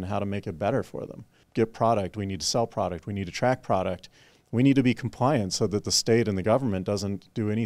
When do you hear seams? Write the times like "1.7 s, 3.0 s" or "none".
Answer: 1.3 s